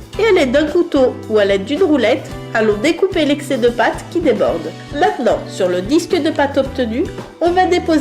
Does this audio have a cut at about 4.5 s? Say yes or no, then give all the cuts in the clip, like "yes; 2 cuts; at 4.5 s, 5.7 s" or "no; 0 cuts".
no; 1 cut; at 1.2 s